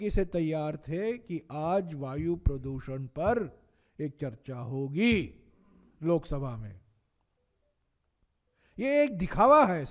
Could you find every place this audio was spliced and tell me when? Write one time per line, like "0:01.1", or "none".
none